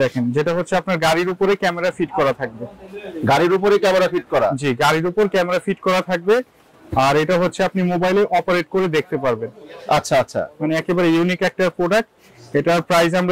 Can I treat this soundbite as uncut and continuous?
yes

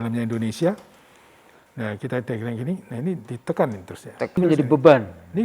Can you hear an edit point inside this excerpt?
yes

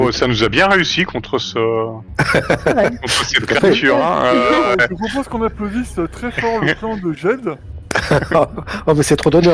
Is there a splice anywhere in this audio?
yes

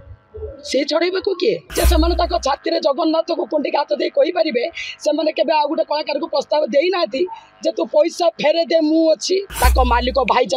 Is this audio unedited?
no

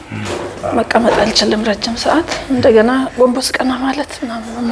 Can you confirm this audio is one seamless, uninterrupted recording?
yes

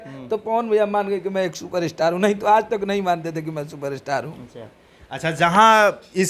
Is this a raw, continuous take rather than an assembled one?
yes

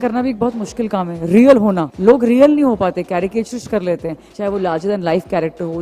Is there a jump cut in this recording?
yes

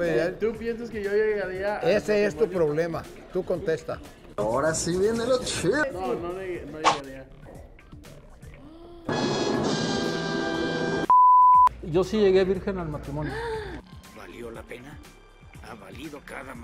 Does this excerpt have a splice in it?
yes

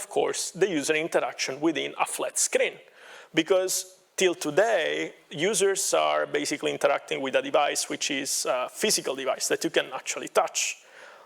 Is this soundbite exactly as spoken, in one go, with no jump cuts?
yes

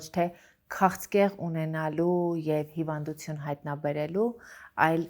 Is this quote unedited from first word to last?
yes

